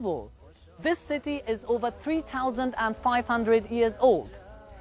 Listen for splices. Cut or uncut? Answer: uncut